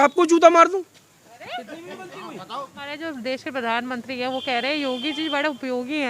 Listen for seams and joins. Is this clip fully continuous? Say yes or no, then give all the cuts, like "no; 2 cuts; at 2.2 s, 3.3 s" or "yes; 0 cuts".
no; 1 cut; at 2.7 s